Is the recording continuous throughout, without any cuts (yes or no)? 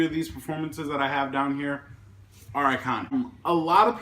no